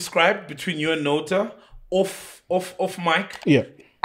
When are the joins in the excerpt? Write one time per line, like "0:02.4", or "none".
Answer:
none